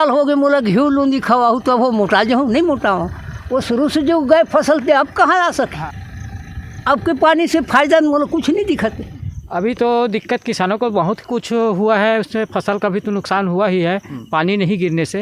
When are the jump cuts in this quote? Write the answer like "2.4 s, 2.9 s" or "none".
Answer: none